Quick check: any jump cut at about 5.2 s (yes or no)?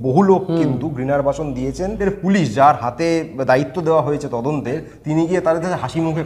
no